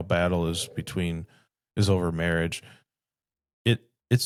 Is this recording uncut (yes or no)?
yes